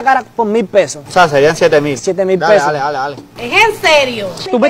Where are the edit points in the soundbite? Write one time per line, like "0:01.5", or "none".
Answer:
none